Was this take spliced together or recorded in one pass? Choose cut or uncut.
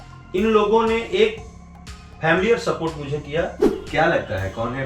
cut